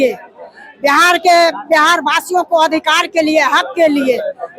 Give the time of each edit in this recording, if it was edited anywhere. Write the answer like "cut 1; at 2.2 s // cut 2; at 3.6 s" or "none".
none